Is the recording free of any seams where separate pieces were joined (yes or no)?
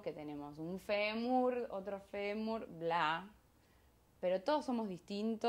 yes